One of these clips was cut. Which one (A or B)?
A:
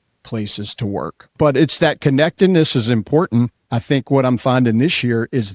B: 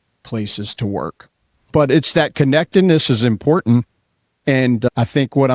A